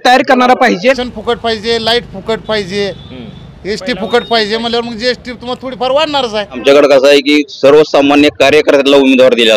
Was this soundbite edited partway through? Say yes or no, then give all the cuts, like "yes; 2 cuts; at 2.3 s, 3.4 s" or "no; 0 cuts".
yes; 2 cuts; at 1.1 s, 6.6 s